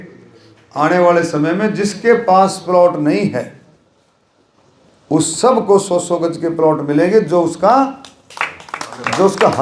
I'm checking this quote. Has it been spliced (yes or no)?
no